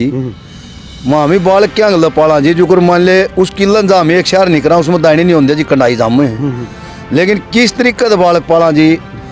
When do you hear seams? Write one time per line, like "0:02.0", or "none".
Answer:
none